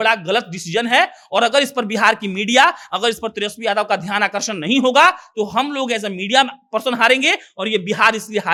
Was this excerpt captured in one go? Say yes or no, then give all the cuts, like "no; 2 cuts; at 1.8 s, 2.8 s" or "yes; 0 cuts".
yes; 0 cuts